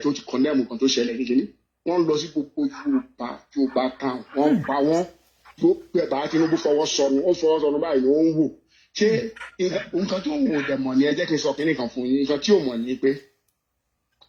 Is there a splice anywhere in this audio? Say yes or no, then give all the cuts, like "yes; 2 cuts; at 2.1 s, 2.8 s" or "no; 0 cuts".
no; 0 cuts